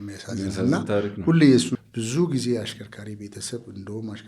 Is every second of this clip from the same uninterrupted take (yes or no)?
no